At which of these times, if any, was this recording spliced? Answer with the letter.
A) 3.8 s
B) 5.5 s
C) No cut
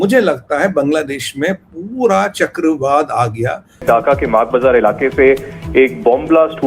A